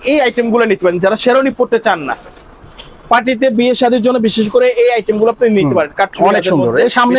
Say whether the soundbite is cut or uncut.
uncut